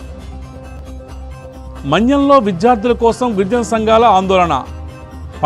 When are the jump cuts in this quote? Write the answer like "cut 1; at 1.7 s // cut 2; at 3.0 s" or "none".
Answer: cut 1; at 1.1 s

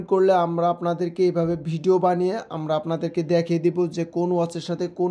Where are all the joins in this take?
none

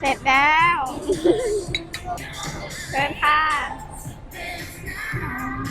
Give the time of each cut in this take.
cut 1; at 2.3 s

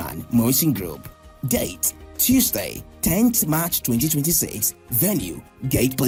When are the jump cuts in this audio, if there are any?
none

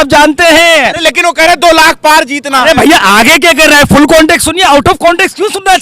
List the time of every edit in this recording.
none

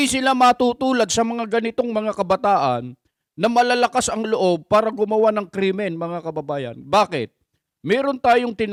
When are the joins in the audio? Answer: none

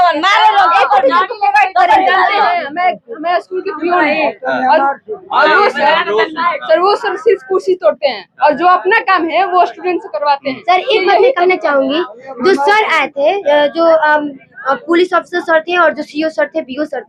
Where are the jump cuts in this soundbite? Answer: none

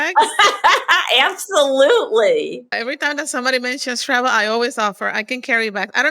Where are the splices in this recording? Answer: cut 1; at 2.7 s

